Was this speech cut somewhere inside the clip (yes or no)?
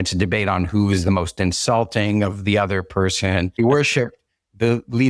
yes